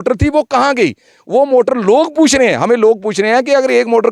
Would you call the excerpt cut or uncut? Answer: uncut